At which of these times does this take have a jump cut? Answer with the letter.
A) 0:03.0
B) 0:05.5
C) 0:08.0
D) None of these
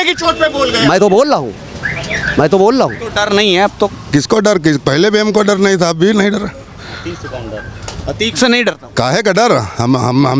A